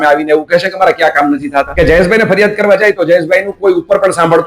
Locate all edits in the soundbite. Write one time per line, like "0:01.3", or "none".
0:01.7